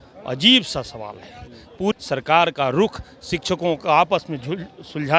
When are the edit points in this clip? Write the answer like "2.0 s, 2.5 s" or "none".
1.9 s